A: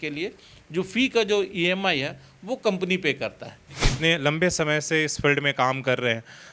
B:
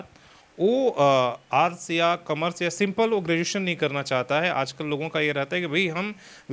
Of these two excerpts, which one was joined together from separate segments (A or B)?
A